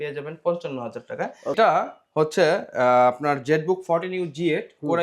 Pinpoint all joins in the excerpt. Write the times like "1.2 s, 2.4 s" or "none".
1.6 s